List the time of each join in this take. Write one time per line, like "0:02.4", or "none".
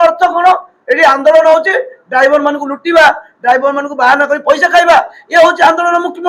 none